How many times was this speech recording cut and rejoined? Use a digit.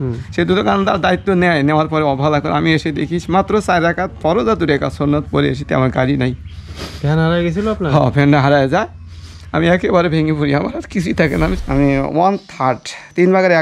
1